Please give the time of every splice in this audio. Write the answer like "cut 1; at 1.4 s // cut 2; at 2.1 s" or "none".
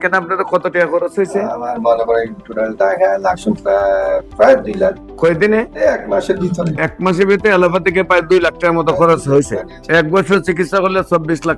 none